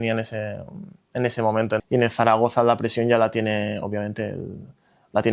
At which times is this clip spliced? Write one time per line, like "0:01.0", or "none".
0:01.8